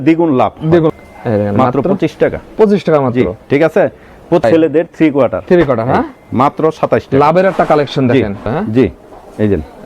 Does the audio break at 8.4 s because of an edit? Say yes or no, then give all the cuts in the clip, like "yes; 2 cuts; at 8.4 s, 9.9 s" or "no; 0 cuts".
yes; 3 cuts; at 0.9 s, 4.4 s, 8.4 s